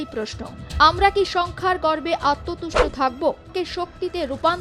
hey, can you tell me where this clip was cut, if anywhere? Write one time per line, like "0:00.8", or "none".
0:03.5